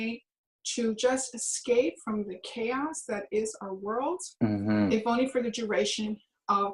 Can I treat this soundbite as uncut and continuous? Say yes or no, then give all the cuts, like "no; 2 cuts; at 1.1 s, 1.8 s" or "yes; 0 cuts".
yes; 0 cuts